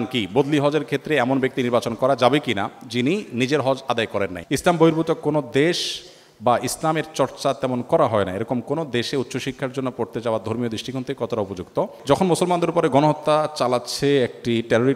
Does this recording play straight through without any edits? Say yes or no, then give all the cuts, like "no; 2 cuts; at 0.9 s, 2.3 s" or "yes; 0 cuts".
no; 2 cuts; at 4.4 s, 12.0 s